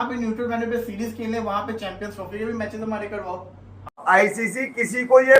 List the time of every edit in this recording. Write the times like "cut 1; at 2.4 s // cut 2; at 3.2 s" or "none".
cut 1; at 4.0 s